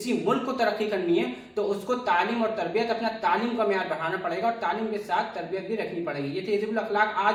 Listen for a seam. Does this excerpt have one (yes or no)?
no